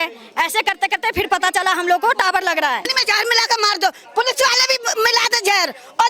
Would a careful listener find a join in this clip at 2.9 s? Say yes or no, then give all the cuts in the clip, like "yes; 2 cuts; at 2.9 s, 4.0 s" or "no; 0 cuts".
yes; 1 cut; at 2.9 s